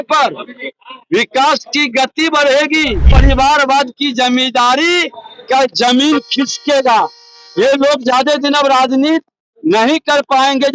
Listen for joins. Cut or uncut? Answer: cut